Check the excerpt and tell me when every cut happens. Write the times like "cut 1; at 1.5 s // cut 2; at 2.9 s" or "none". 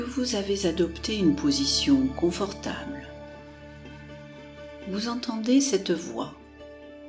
cut 1; at 3.3 s // cut 2; at 4.9 s